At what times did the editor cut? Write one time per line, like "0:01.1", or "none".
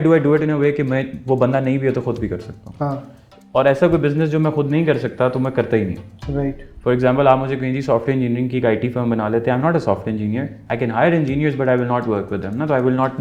none